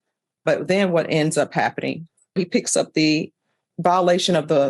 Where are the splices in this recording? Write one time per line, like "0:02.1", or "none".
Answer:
0:02.4